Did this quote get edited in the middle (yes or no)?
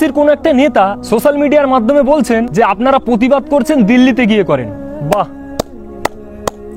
yes